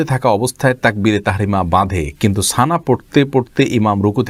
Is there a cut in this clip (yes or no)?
no